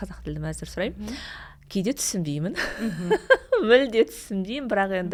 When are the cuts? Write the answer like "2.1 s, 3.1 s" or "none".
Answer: none